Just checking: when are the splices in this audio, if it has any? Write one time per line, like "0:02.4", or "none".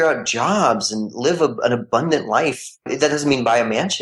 0:02.8